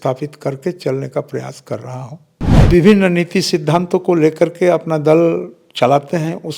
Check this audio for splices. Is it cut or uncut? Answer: cut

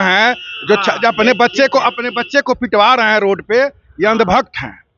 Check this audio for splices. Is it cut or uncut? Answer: uncut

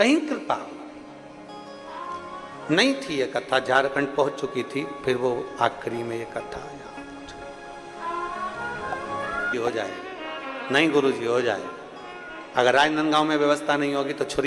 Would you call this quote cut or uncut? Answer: cut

